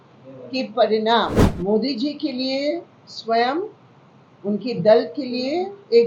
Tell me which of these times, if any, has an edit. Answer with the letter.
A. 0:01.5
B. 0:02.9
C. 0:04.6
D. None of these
A